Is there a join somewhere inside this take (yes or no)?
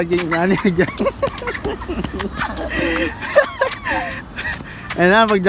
no